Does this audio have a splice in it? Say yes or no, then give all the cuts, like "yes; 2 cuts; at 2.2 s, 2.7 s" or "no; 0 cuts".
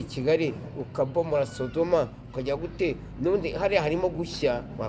no; 0 cuts